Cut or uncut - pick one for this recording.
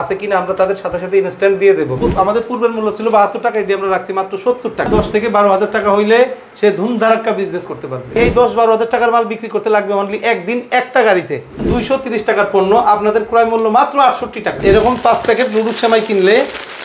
cut